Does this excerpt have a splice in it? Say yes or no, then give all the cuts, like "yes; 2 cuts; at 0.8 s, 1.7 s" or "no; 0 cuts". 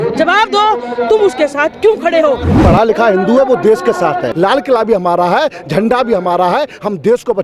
yes; 2 cuts; at 2.6 s, 4.3 s